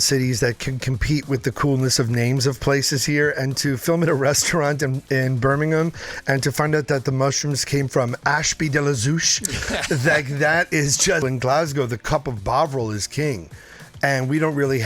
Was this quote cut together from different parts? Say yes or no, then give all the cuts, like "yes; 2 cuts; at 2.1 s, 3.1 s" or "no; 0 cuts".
yes; 1 cut; at 11.2 s